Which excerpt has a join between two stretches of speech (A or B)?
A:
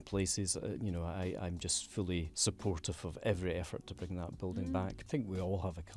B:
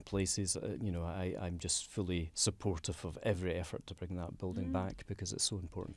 A